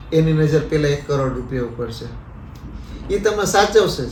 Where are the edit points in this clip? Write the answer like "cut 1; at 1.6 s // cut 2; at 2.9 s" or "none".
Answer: none